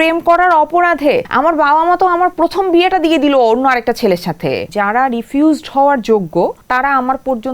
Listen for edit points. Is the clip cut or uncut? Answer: cut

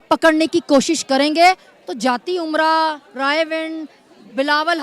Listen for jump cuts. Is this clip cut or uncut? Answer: uncut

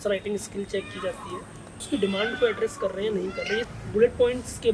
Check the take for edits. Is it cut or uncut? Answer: cut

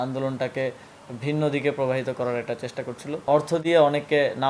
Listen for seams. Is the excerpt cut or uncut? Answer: cut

